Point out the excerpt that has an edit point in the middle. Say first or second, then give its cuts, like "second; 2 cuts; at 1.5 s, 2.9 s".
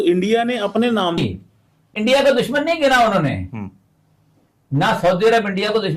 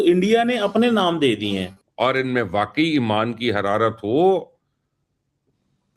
first; 1 cut; at 1.2 s